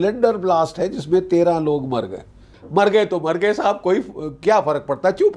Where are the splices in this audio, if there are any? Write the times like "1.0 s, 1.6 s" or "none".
2.6 s